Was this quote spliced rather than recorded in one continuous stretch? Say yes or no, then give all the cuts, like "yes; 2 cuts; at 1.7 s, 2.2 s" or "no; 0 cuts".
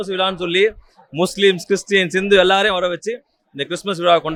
no; 0 cuts